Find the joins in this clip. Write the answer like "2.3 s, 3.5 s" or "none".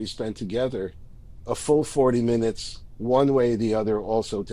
none